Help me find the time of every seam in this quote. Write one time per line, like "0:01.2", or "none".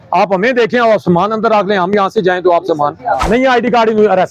0:03.3